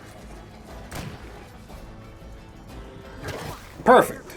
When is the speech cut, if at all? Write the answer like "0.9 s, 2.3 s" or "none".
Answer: none